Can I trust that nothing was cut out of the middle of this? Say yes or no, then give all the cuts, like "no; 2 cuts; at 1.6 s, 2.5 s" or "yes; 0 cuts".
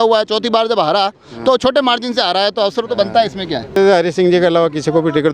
no; 1 cut; at 3.8 s